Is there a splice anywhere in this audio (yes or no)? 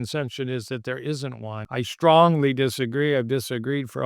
yes